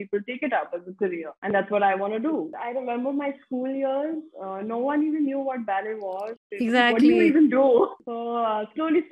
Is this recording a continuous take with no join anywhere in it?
no; 2 cuts; at 2.6 s, 8.1 s

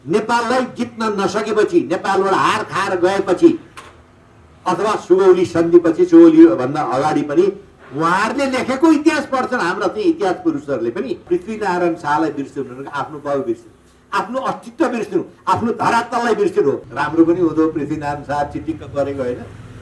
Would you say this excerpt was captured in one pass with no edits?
no; 2 cuts; at 11.2 s, 16.9 s

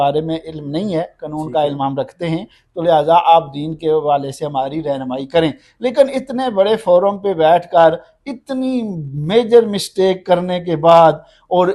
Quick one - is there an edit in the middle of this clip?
no; 0 cuts

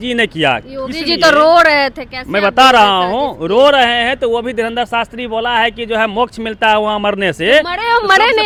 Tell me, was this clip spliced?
no; 0 cuts

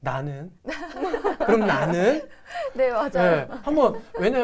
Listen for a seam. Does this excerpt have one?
no; 0 cuts

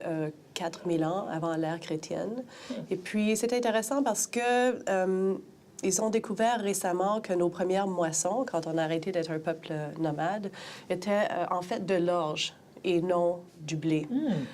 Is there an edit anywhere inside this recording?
yes; 1 cut; at 7.7 s

